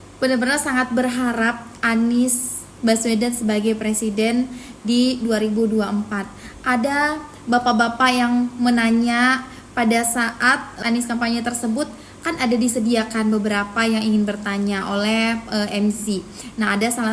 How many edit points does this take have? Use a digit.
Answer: 1